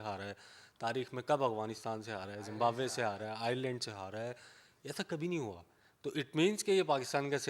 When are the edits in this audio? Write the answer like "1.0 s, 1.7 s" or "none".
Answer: none